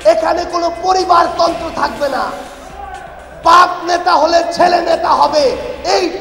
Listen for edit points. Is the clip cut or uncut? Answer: uncut